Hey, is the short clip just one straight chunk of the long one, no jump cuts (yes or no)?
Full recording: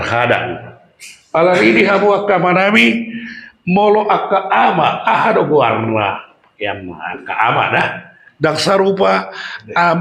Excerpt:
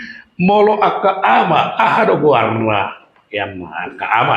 yes